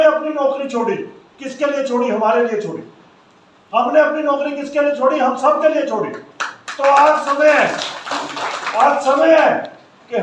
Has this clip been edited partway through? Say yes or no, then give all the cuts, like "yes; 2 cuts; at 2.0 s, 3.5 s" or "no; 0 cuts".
no; 0 cuts